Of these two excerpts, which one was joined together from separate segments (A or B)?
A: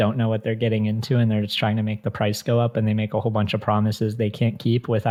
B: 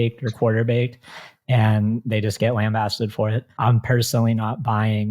B